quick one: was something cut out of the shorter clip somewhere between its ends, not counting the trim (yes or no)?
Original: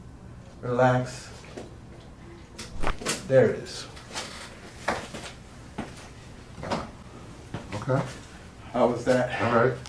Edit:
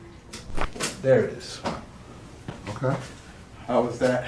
yes